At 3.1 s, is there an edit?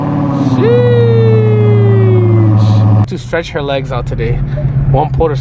yes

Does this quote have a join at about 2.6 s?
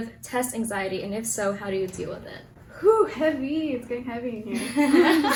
no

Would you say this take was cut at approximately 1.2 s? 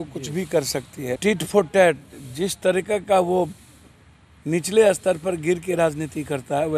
yes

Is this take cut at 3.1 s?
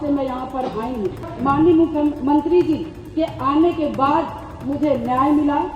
no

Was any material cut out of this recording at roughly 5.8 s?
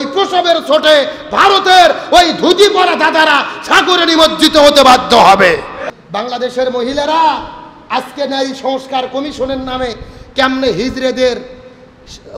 yes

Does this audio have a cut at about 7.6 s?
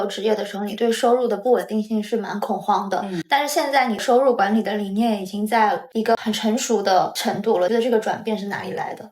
yes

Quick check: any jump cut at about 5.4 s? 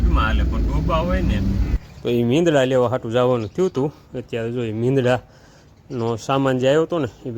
no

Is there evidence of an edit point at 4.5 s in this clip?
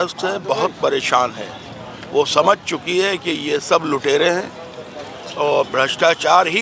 no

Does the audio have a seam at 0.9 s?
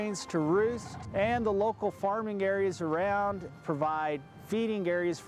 yes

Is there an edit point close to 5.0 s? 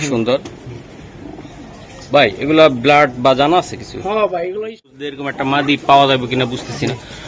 yes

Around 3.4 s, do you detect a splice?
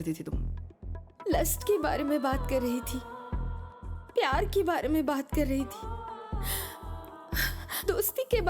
no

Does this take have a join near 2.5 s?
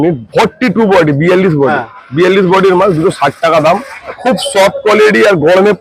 no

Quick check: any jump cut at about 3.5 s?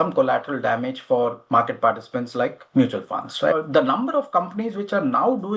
yes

